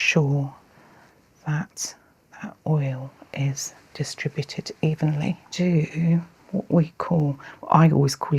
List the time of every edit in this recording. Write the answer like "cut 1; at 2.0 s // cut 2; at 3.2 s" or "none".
cut 1; at 5.5 s